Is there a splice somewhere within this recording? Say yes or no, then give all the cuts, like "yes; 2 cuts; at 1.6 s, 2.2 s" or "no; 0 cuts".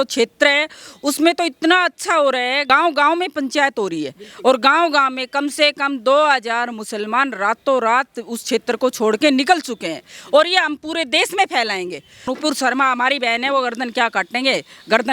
yes; 2 cuts; at 2.6 s, 12.2 s